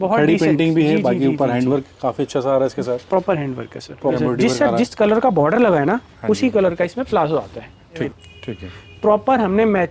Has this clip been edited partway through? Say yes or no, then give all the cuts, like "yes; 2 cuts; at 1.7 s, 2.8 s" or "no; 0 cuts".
yes; 2 cuts; at 4.1 s, 8.1 s